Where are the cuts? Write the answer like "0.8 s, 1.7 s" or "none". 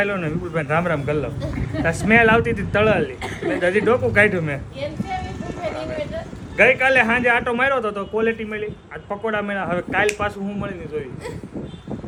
none